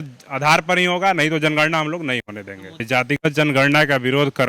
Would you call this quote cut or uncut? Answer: cut